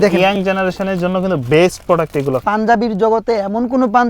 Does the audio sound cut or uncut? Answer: cut